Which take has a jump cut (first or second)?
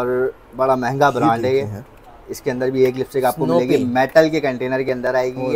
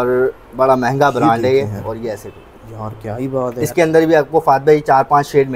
second